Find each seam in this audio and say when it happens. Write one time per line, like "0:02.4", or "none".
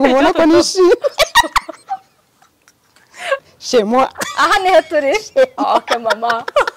0:03.5